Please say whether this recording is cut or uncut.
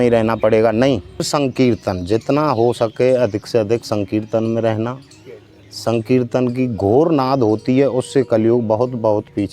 cut